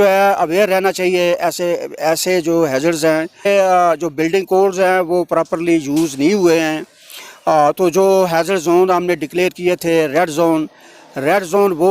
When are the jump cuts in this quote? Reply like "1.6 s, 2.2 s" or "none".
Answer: 3.5 s